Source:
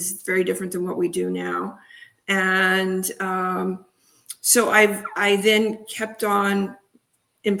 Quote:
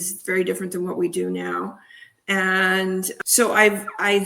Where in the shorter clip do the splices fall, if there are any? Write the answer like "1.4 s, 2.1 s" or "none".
3.1 s